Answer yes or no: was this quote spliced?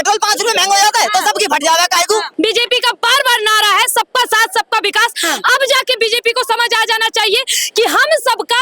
yes